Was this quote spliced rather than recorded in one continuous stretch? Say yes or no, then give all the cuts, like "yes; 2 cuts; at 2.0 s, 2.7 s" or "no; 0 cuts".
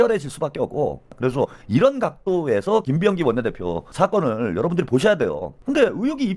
yes; 2 cuts; at 1.3 s, 5.5 s